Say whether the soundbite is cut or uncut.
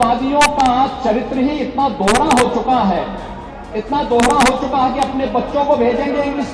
uncut